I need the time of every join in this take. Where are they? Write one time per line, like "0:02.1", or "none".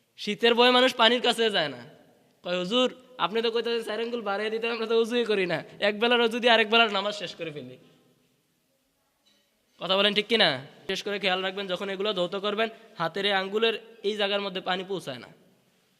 0:10.9